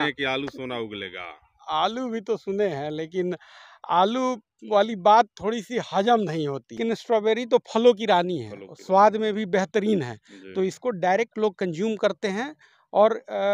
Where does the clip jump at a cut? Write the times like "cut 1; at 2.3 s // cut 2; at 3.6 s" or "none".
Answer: cut 1; at 6.8 s